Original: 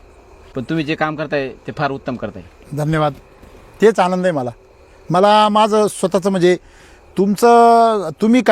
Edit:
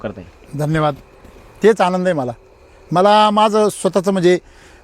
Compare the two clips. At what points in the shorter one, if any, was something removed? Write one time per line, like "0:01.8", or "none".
none